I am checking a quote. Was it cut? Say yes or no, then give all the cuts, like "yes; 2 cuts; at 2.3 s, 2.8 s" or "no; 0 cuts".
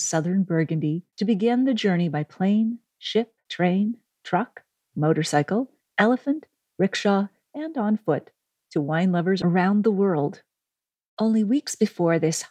yes; 2 cuts; at 1.1 s, 3.4 s